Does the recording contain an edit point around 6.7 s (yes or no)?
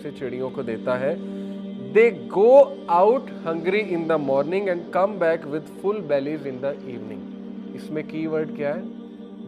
yes